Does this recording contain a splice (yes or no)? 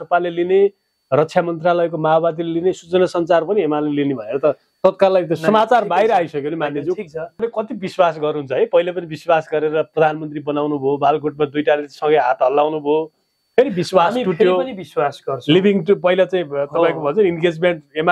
yes